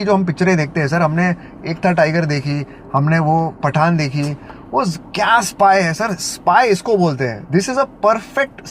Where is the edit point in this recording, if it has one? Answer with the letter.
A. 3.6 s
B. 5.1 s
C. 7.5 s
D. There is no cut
D